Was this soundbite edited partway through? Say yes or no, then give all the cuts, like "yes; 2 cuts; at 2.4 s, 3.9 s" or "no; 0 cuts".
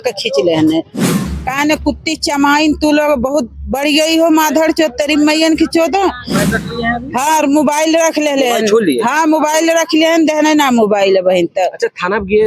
yes; 1 cut; at 1.2 s